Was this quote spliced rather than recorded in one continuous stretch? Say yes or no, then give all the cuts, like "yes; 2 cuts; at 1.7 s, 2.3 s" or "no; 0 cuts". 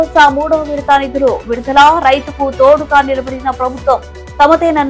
no; 0 cuts